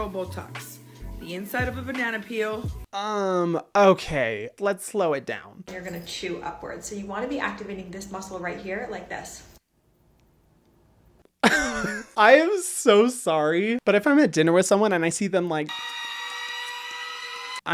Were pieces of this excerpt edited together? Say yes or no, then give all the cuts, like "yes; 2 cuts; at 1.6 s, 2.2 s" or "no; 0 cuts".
yes; 3 cuts; at 2.8 s, 5.7 s, 12.0 s